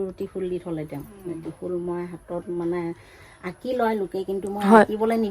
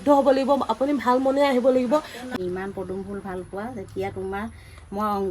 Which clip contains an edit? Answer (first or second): second